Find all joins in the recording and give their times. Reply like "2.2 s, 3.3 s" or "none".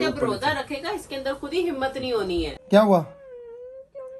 2.6 s